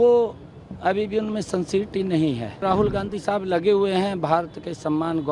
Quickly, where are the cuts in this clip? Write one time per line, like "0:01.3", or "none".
0:02.6